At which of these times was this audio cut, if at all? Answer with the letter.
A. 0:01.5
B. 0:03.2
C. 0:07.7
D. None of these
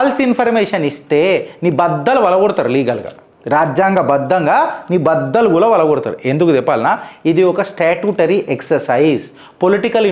D